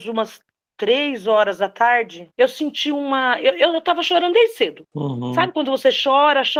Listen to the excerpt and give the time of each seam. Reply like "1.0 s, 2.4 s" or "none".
none